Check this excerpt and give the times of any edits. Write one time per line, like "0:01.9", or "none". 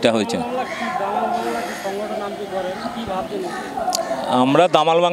none